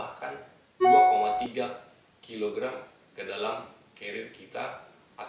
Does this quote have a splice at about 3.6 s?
no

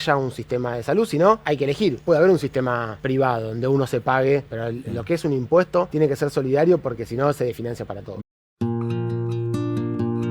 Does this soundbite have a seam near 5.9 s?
yes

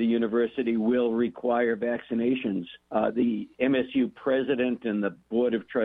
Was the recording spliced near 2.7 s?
yes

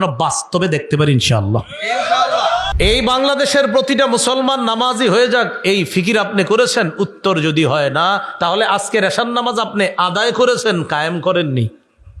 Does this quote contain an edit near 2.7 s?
yes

